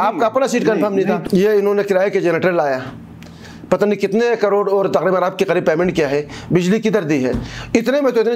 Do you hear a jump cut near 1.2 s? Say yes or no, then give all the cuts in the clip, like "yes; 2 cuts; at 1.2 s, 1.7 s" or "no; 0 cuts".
yes; 1 cut; at 1.2 s